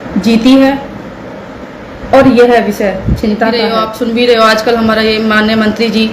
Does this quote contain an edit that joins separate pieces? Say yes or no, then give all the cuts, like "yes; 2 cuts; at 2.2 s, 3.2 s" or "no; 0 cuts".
yes; 1 cut; at 3.8 s